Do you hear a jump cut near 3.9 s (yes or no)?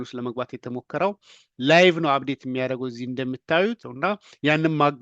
yes